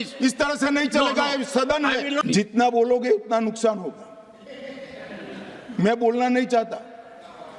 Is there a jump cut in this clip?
yes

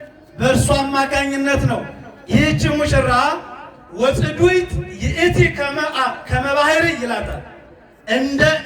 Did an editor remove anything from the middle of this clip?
no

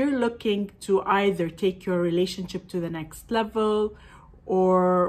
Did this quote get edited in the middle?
no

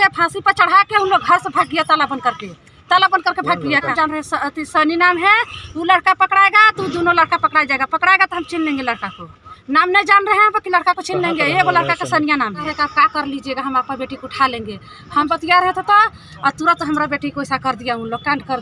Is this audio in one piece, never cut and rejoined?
no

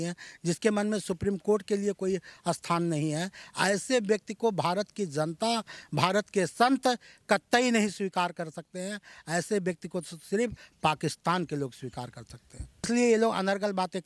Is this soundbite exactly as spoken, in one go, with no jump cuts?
no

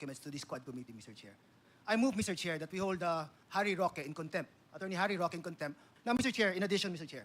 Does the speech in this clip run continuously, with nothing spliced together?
no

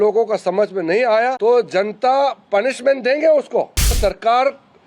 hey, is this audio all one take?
no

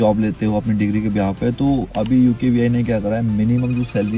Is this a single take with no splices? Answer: yes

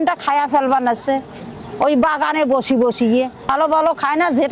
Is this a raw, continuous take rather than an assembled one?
no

